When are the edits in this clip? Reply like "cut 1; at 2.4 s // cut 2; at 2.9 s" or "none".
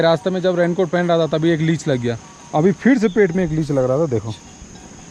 none